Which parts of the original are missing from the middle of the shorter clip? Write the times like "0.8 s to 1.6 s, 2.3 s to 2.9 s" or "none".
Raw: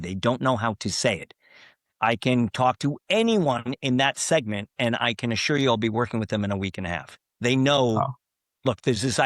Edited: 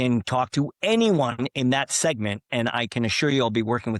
none